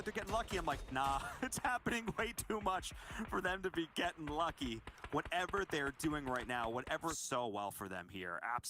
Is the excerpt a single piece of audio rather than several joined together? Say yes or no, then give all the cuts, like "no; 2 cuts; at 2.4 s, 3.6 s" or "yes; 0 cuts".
no; 1 cut; at 7.2 s